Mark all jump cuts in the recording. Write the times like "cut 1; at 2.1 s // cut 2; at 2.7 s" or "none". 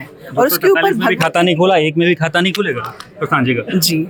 none